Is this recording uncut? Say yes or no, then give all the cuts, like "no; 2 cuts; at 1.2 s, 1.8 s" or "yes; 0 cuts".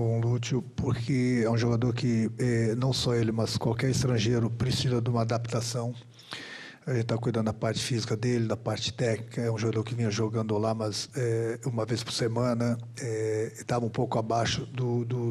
yes; 0 cuts